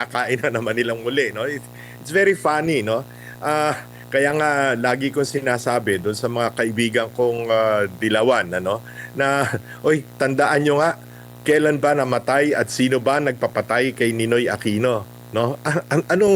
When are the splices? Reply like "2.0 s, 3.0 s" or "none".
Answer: none